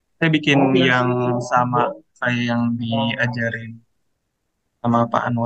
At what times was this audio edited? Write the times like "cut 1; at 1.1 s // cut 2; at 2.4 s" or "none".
none